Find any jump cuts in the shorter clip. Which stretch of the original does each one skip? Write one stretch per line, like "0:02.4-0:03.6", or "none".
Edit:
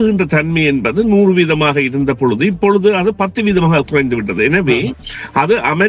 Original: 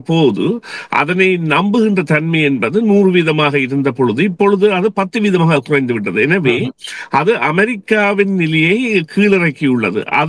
none

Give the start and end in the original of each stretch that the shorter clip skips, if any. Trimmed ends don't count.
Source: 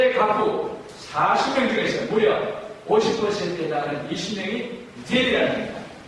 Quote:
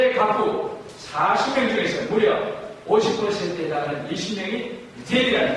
none

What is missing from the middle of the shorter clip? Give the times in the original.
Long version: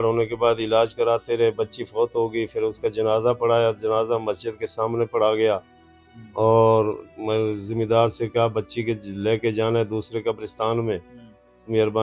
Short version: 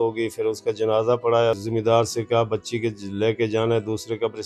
0:03.8-0:07.7

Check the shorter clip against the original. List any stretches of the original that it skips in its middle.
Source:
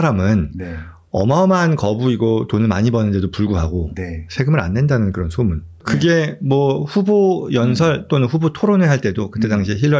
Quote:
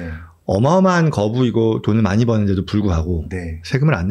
none

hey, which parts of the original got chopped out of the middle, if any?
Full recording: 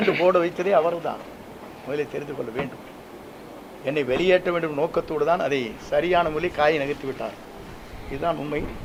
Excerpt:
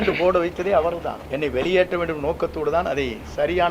0:01.2-0:03.7

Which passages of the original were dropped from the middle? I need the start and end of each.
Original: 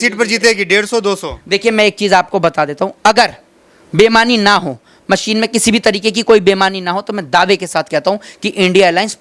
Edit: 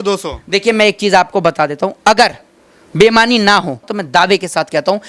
0:04.9-0:07.1

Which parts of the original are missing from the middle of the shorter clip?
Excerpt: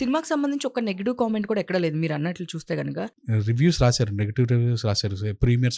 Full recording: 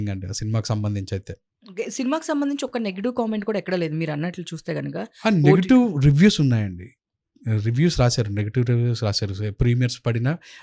0:05.0-0:07.2

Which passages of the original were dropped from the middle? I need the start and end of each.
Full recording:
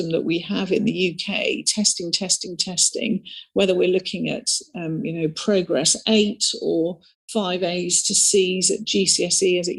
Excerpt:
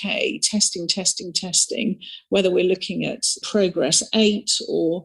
0:04.7-0:05.4

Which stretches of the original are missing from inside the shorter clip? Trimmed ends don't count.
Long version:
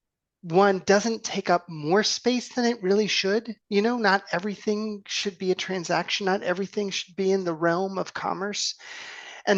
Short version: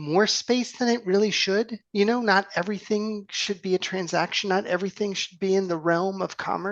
none

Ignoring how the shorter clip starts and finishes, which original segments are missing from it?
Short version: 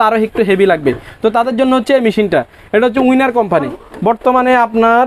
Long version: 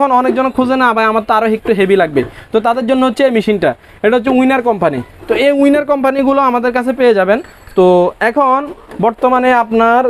0:05.1-0:08.8

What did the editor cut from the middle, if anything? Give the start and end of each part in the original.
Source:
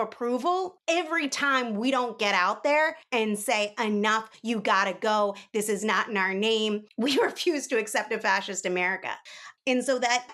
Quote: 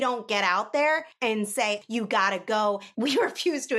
0:03.7-0:04.4
0:05.4-0:06.9

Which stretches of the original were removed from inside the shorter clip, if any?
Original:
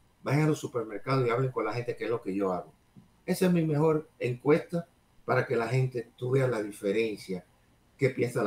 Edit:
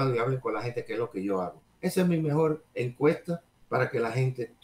0:02.7-0:03.1
0:05.0-0:05.1

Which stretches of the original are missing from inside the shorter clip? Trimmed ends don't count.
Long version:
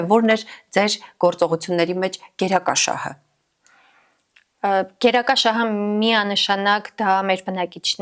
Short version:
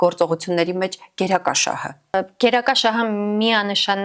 0:03.3-0:04.7

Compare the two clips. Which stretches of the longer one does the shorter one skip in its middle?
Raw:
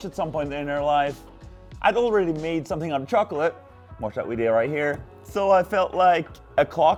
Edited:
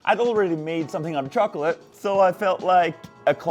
0:03.7-0:05.2

